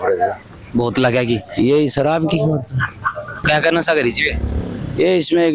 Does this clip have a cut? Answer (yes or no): yes